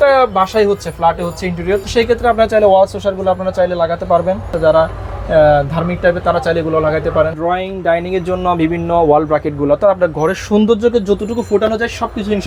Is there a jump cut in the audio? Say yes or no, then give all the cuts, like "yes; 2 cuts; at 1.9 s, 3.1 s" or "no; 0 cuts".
yes; 3 cuts; at 1.8 s, 4.5 s, 7.3 s